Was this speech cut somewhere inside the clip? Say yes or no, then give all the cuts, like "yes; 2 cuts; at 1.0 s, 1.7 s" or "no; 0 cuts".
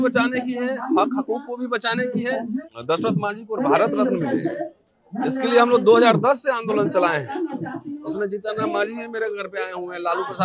yes; 1 cut; at 2.6 s